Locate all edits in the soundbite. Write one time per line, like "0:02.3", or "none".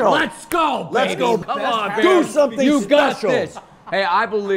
0:01.4